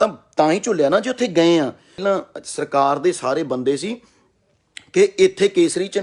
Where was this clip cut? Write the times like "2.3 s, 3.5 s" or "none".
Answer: 2.0 s